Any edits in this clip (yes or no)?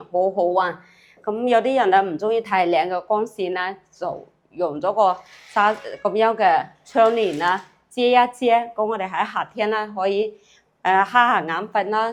no